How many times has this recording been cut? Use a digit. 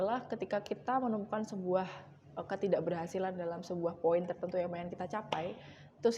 0